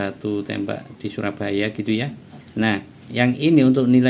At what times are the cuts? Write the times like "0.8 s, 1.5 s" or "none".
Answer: 0.9 s, 2.6 s